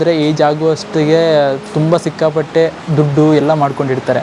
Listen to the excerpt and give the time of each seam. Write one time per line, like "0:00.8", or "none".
none